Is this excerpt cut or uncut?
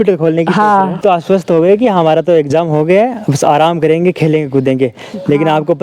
cut